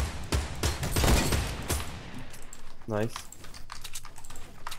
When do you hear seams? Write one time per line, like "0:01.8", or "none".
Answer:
none